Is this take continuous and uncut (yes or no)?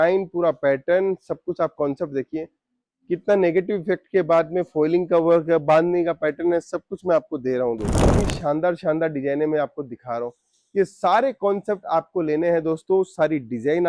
no